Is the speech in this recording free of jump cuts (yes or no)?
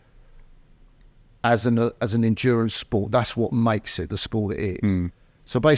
yes